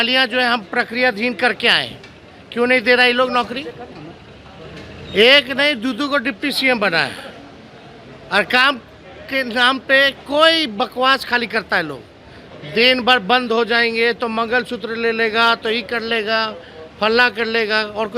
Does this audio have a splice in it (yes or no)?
no